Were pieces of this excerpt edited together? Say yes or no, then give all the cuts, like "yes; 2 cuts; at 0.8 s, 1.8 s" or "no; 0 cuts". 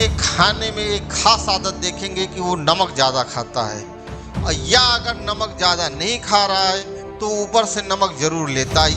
no; 0 cuts